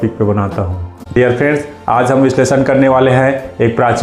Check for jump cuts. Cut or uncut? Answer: cut